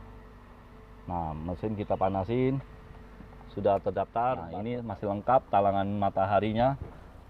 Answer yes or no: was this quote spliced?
yes